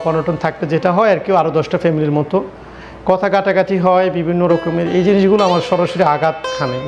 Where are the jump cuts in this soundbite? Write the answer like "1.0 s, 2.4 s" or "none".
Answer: none